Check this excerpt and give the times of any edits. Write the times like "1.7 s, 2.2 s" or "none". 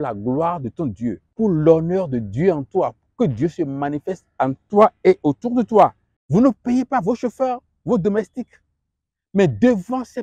1.2 s, 6.1 s